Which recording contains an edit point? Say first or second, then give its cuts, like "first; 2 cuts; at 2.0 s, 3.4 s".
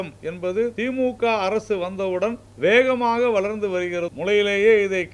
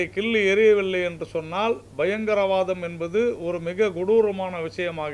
first; 3 cuts; at 0.8 s, 2.5 s, 4.1 s